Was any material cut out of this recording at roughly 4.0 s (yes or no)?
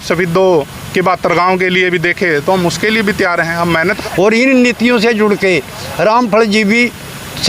yes